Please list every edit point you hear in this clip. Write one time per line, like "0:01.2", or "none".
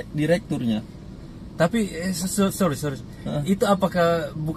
none